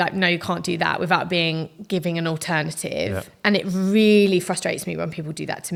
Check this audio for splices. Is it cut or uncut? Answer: uncut